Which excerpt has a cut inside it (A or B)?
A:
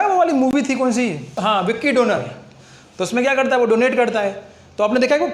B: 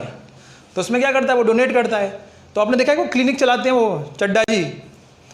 A